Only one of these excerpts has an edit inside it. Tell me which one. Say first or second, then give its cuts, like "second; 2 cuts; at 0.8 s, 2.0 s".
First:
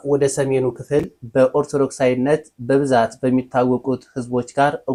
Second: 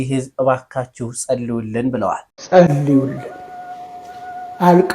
second; 1 cut; at 2.3 s